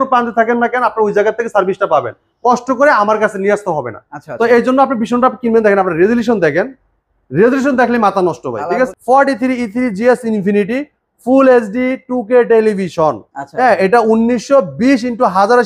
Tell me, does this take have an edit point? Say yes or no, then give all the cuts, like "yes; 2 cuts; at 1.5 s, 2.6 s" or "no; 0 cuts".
yes; 1 cut; at 8.9 s